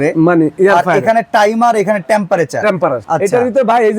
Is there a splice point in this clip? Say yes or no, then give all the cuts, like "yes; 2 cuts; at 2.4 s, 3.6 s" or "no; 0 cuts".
yes; 1 cut; at 3.0 s